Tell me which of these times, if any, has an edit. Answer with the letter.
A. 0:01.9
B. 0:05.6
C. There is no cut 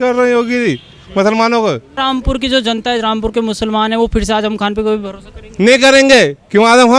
A